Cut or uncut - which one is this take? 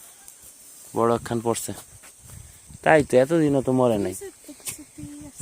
cut